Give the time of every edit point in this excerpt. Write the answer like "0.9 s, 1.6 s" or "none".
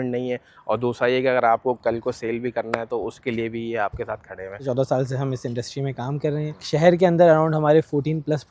4.6 s, 6.6 s

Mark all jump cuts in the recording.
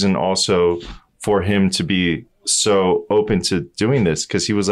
none

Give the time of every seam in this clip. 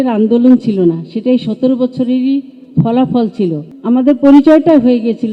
3.8 s

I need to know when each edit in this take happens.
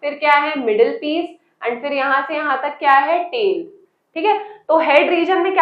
none

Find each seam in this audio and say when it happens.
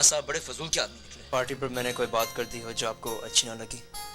1.2 s

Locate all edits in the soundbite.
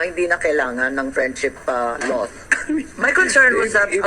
2.6 s

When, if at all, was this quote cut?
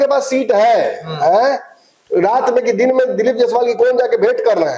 none

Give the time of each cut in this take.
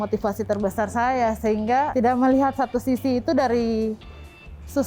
1.9 s

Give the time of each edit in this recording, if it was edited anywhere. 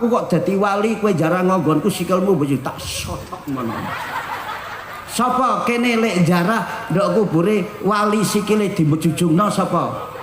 none

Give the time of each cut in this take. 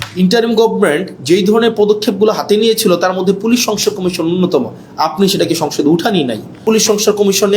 6.6 s

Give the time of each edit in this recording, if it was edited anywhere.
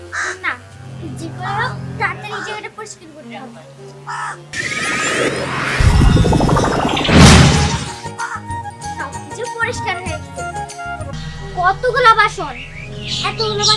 11.1 s

